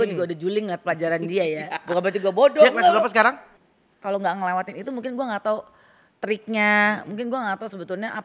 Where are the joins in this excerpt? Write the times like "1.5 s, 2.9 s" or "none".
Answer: 3.5 s